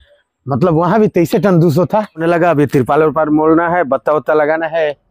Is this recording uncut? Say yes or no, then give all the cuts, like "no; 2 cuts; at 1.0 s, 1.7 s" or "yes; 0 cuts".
no; 1 cut; at 2.2 s